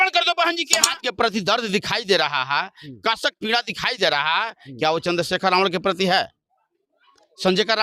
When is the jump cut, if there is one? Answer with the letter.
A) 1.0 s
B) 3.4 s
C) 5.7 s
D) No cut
A